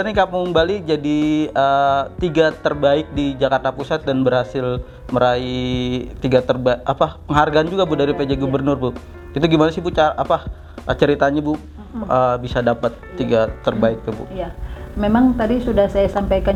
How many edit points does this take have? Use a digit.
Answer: 0